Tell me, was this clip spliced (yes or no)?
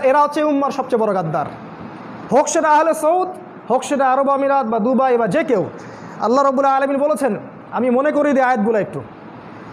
no